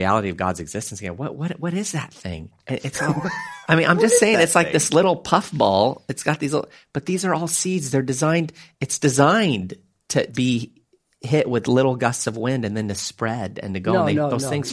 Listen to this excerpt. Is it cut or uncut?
cut